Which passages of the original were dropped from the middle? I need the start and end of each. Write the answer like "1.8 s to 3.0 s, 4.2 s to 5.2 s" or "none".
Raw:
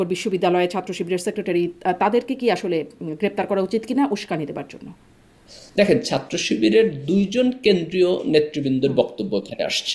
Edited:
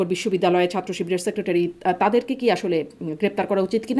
none